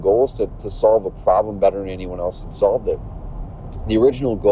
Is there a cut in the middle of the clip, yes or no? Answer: no